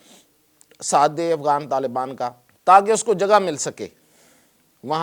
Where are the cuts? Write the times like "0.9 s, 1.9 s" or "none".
2.5 s